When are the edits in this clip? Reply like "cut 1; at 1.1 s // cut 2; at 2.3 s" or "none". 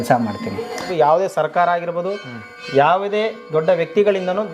cut 1; at 0.9 s